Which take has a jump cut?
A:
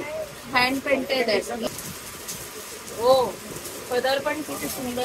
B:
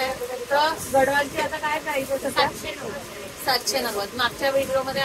A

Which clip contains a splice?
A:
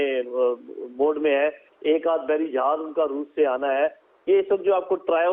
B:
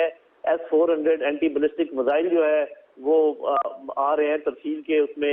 A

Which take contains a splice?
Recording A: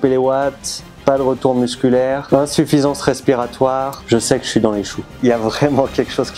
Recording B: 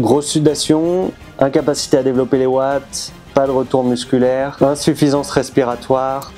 A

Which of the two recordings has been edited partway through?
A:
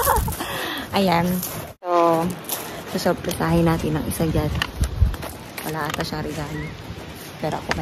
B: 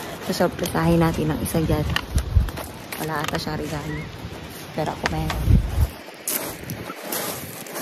A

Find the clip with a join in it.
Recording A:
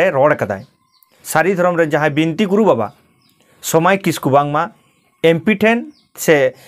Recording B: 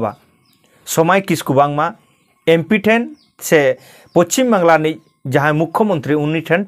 A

